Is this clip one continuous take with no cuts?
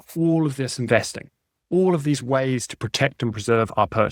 yes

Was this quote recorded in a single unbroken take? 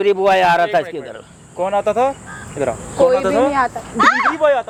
yes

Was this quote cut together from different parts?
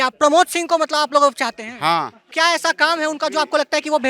yes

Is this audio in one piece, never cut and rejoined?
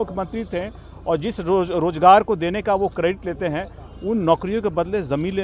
yes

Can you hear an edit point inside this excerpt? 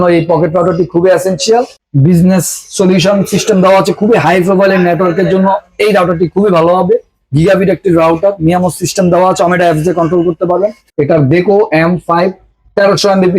yes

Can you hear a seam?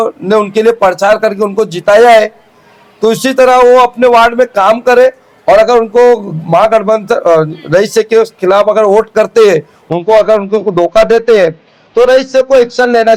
no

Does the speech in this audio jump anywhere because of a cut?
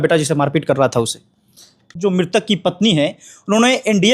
yes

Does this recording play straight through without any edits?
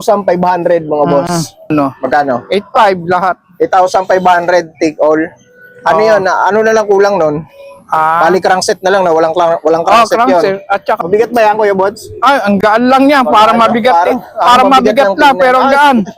no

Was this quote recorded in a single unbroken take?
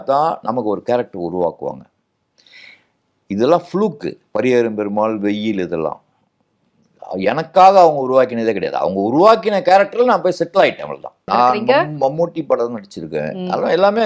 no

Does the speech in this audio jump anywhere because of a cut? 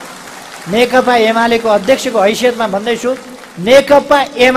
no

